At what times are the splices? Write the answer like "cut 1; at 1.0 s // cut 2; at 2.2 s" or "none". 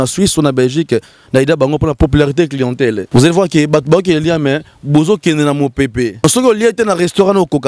cut 1; at 2.0 s // cut 2; at 3.0 s // cut 3; at 6.2 s